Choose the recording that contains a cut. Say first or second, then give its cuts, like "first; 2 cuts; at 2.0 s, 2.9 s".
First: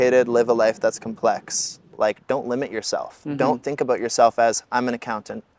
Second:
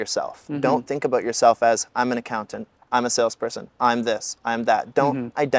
first; 1 cut; at 1.9 s